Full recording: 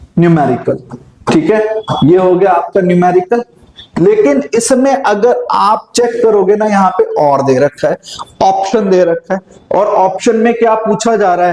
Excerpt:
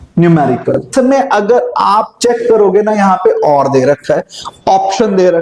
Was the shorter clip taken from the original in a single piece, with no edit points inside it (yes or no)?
no